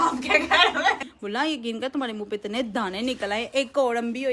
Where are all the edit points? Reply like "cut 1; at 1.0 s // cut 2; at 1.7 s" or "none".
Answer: cut 1; at 1.1 s